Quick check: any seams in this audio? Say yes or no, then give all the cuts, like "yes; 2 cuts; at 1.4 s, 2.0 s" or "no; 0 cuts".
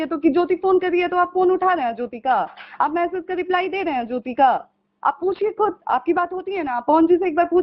no; 0 cuts